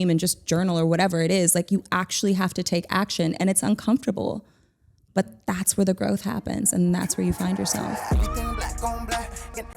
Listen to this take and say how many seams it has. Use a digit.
1